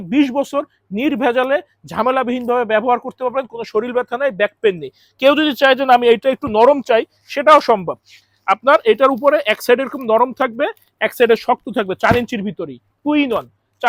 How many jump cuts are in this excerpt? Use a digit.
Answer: 0